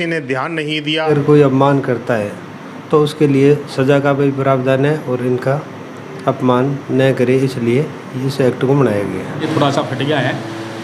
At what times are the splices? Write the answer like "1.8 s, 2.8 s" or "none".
1.1 s, 9.4 s